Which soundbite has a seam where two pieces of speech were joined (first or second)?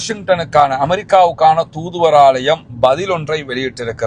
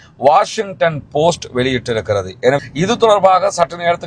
second